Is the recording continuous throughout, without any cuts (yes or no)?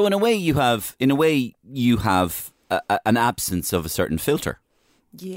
yes